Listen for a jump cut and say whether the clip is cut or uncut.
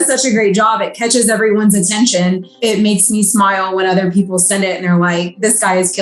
cut